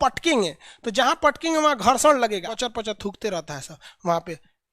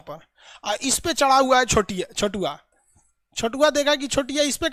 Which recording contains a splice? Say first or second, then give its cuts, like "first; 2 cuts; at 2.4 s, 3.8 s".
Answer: first; 1 cut; at 2.5 s